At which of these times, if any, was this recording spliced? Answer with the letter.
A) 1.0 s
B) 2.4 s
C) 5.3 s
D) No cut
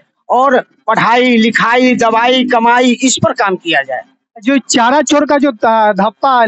D